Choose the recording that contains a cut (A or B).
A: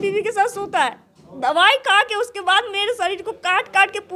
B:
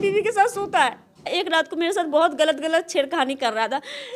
B